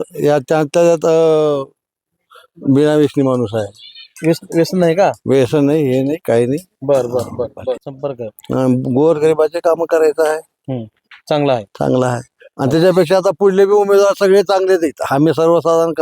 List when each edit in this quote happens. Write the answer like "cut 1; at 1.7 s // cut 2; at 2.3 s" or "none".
cut 1; at 7.9 s